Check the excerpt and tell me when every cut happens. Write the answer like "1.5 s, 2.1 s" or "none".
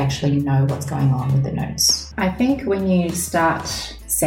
2.0 s